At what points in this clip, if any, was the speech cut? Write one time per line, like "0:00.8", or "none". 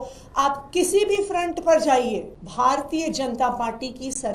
0:02.4